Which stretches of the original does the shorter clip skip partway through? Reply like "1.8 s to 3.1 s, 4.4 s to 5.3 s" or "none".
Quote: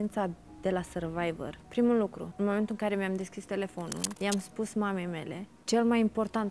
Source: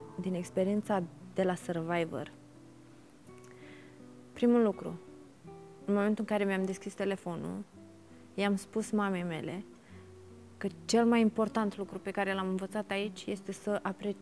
2.3 s to 4.2 s, 4.9 s to 5.7 s, 7.6 s to 8.2 s, 9.8 s to 10.8 s